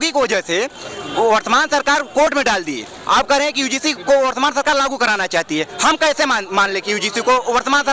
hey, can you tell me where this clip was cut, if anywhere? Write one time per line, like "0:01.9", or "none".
none